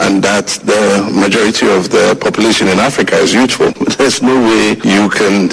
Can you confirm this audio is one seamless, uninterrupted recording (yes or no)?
no